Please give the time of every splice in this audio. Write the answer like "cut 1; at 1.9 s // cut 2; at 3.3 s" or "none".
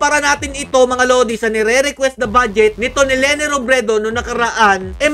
none